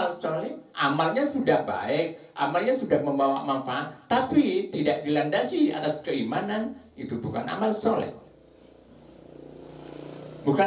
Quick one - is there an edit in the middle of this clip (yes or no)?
no